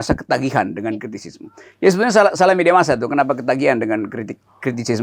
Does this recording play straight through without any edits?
yes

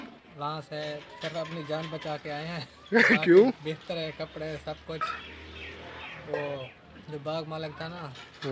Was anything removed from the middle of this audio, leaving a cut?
no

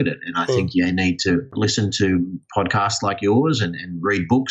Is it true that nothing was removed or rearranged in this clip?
no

